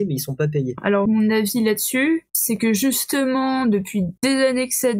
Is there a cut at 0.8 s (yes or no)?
yes